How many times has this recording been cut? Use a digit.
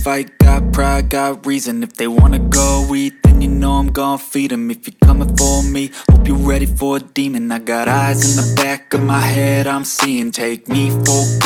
0